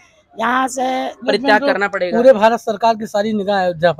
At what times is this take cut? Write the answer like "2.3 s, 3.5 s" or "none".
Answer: 1.2 s